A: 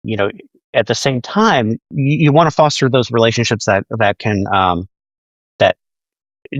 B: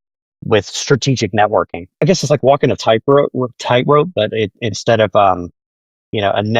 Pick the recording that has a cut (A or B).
B